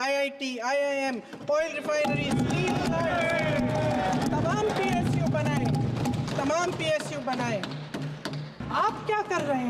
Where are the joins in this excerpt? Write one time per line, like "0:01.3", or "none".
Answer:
0:08.6